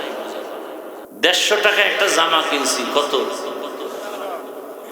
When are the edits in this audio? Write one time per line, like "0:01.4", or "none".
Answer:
0:01.0

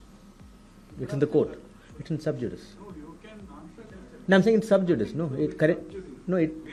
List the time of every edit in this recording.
none

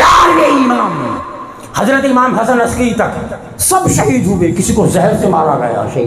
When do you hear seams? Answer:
none

